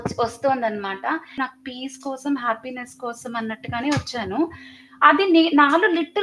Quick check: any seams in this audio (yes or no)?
yes